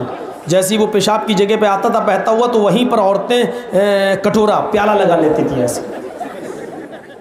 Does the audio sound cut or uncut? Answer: uncut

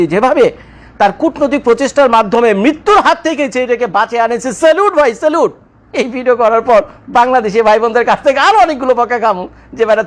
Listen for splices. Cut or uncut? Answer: uncut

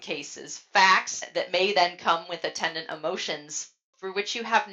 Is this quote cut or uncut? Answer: cut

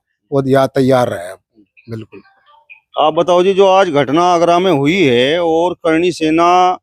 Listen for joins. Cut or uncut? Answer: uncut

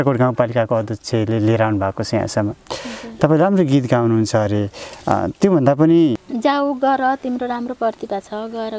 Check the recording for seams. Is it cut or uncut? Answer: cut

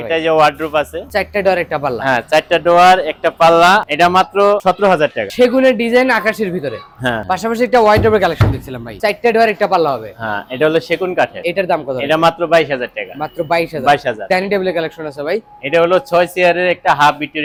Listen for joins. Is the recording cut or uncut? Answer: uncut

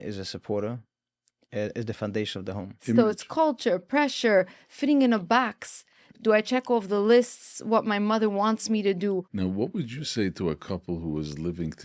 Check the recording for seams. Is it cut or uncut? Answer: cut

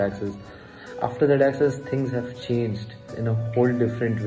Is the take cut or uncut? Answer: cut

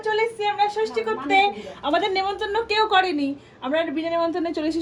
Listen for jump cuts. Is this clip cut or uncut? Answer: uncut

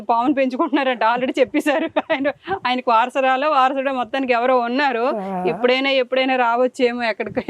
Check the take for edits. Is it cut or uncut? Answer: uncut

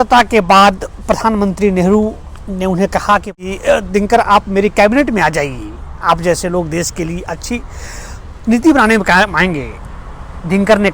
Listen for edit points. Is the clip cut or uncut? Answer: cut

